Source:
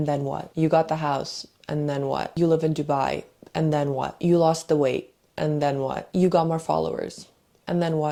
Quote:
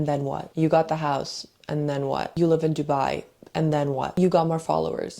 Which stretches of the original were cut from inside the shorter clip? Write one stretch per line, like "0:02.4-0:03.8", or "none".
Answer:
0:04.1-0:06.1